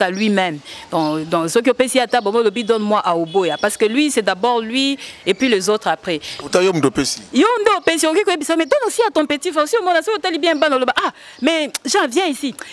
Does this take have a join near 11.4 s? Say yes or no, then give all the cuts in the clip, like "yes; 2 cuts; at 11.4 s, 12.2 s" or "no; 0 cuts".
no; 0 cuts